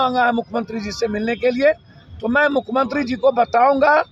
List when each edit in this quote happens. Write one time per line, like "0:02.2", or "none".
none

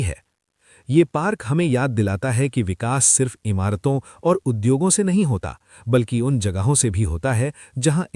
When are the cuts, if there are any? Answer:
none

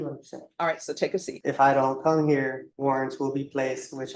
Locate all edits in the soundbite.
0:01.3
0:02.7

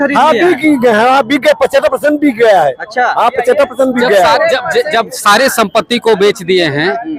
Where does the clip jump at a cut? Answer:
none

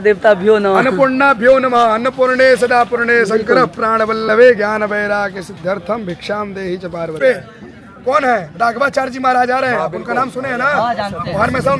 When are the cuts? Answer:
0:07.2

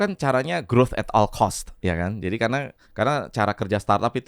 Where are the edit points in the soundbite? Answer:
0:01.7
0:02.8

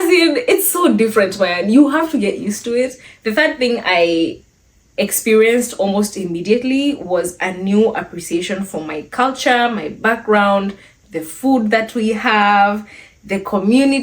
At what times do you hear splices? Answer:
0:03.1

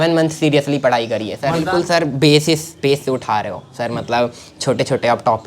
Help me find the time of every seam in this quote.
0:01.6

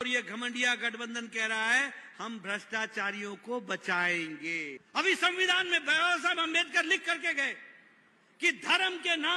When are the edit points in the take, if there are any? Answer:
0:04.8

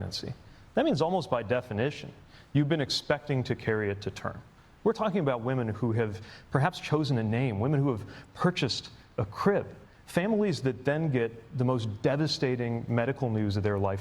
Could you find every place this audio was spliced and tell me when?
0:05.0

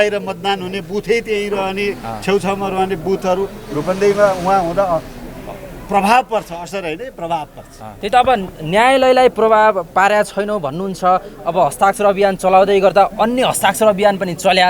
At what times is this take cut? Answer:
0:07.8

